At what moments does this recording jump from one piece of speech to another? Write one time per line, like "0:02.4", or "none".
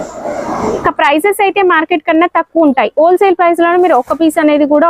none